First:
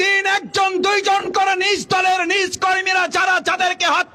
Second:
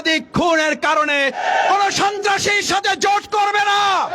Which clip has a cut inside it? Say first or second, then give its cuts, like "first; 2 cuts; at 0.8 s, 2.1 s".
second; 1 cut; at 1.4 s